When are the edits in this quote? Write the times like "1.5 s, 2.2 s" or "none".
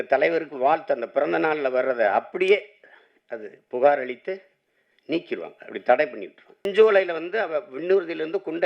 6.6 s